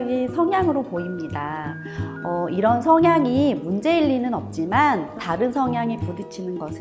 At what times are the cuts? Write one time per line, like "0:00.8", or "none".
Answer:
0:05.2